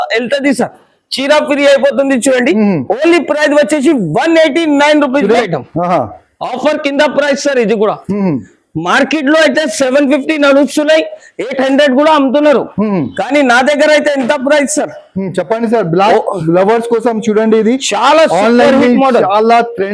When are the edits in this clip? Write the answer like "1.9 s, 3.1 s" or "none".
5.4 s